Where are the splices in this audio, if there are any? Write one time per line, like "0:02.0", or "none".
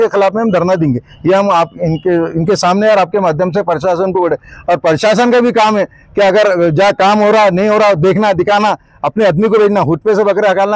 none